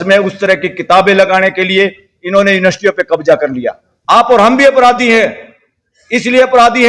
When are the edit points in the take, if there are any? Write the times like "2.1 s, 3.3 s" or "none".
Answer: 3.9 s